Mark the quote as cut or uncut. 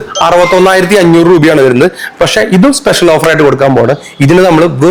uncut